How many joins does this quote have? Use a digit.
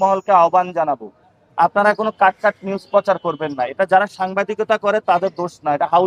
0